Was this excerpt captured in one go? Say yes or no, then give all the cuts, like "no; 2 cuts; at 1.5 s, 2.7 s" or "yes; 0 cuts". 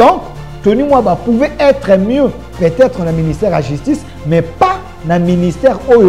yes; 0 cuts